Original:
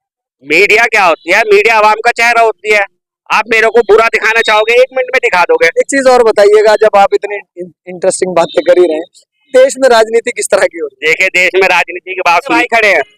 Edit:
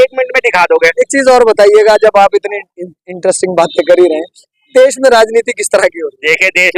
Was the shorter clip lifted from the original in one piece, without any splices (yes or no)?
yes